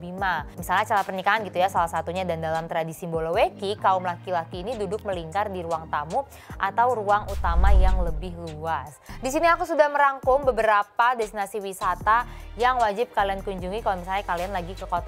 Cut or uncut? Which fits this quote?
cut